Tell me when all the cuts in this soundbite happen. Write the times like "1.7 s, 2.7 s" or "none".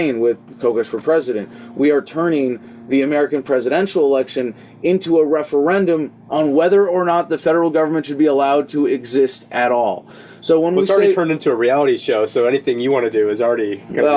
none